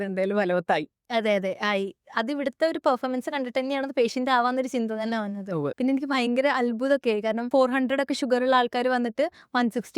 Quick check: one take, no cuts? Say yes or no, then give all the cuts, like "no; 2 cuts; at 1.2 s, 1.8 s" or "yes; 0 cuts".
no; 2 cuts; at 5.7 s, 7.5 s